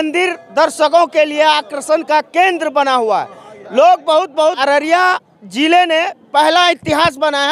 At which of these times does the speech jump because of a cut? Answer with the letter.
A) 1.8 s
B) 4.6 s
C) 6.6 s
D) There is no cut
B